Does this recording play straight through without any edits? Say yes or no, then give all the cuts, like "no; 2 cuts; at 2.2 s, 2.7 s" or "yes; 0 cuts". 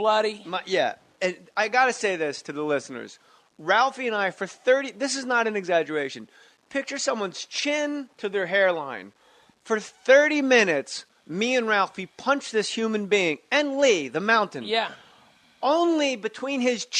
no; 1 cut; at 1.4 s